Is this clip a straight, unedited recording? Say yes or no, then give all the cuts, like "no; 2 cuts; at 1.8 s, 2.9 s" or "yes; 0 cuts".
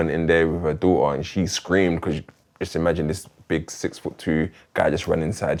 yes; 0 cuts